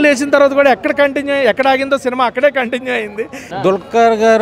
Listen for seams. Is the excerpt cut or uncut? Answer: cut